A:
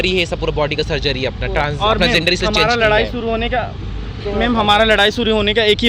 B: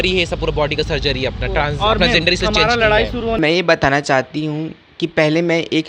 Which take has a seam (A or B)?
B